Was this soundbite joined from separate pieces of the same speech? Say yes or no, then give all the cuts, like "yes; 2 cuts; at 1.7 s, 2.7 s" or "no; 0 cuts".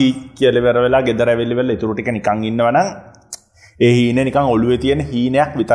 no; 0 cuts